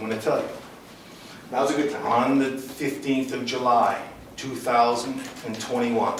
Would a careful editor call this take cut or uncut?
uncut